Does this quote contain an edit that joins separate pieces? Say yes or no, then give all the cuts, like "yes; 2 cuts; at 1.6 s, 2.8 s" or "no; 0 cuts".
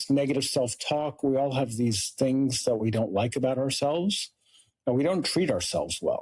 no; 0 cuts